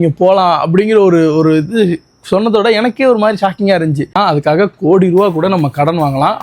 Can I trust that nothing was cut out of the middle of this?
no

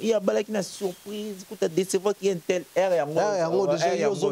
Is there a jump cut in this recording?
no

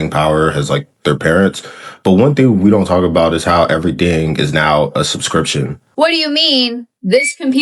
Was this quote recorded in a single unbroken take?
no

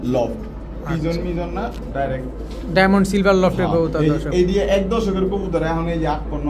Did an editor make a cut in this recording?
no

